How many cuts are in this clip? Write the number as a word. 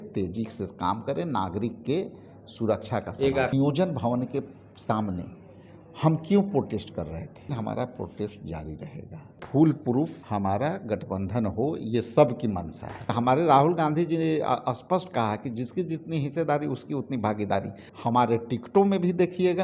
six